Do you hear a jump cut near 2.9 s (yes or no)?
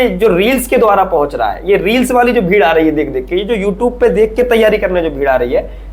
no